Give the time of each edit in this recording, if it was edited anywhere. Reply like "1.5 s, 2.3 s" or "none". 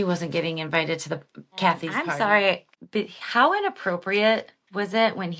1.9 s, 2.7 s